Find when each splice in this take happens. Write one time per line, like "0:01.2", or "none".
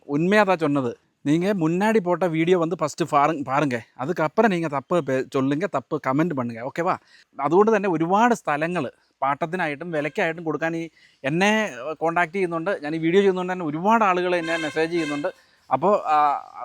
0:01.3
0:07.3